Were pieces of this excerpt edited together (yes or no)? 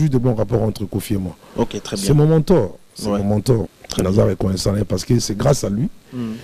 yes